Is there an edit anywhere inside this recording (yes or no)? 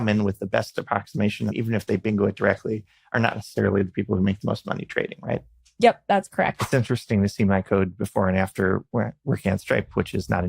yes